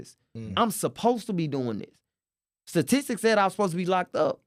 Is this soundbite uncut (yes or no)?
yes